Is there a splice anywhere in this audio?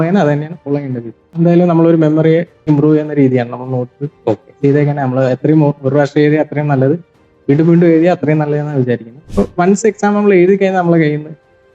yes; 3 cuts; at 1.4 s, 2.7 s, 9.1 s

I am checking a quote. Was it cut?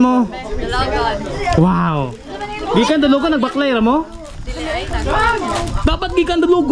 no; 0 cuts

